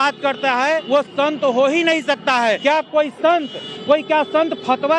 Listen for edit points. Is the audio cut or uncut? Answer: cut